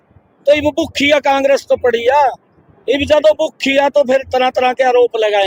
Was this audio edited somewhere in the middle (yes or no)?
no